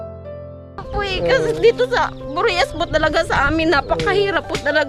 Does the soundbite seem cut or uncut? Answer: cut